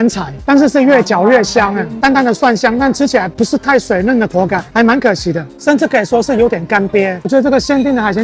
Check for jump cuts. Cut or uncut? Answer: cut